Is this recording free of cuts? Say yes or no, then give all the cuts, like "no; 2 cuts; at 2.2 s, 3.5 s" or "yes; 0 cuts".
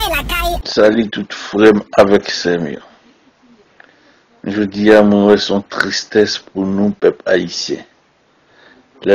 yes; 0 cuts